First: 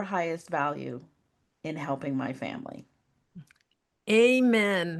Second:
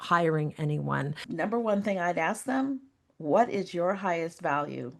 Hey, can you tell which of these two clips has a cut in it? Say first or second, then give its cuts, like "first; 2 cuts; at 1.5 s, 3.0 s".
second; 1 cut; at 1.2 s